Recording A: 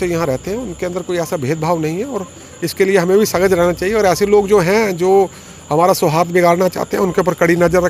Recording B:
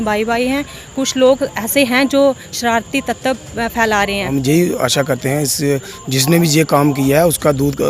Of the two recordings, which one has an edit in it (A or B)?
B